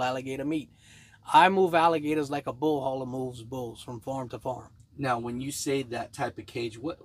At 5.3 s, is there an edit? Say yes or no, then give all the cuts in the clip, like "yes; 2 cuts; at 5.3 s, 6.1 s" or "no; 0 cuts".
no; 0 cuts